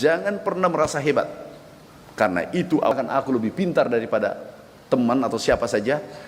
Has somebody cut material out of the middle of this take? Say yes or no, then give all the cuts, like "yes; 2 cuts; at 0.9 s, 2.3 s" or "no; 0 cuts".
yes; 1 cut; at 2.9 s